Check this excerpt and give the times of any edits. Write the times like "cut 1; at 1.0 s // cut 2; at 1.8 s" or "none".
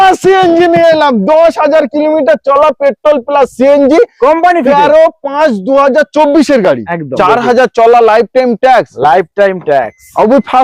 cut 1; at 7.1 s